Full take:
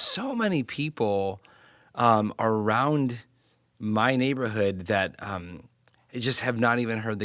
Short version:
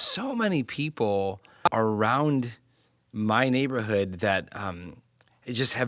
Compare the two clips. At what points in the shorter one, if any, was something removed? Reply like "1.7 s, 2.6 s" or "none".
1.7 s